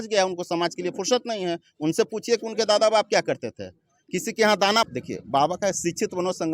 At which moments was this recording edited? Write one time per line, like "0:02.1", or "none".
0:04.9